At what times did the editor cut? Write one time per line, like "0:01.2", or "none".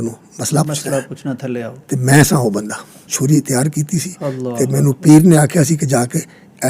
0:03.1